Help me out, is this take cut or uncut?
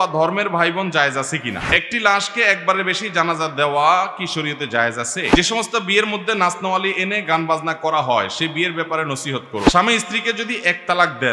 cut